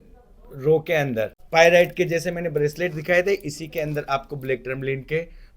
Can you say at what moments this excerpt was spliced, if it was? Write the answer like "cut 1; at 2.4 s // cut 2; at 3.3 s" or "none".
cut 1; at 1.4 s